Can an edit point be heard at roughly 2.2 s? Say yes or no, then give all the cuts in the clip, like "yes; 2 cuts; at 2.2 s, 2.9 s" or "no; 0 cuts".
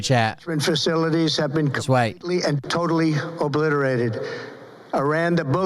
yes; 1 cut; at 2.2 s